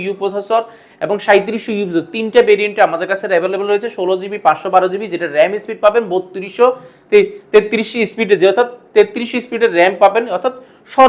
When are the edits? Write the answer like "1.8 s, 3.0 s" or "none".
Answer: none

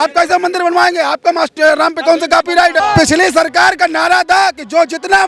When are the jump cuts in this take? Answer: 2.8 s

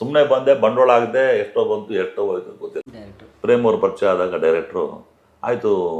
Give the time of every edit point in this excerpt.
3.4 s

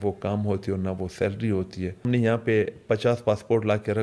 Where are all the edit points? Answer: 2.1 s

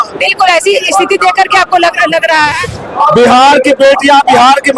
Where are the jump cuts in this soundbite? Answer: 2.7 s

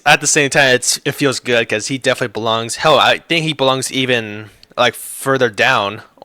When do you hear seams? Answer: none

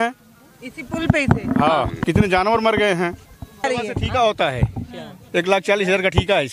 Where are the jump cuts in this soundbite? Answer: 2.0 s, 3.6 s

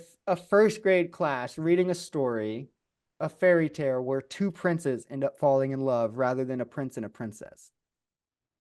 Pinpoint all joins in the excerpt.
none

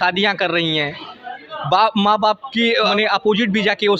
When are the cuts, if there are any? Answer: 2.9 s

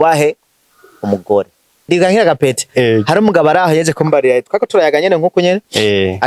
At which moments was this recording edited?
1.8 s

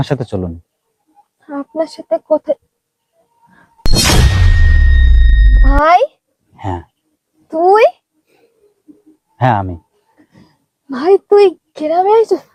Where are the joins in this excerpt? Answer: none

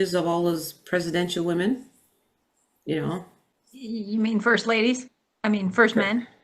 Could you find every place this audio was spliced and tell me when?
none

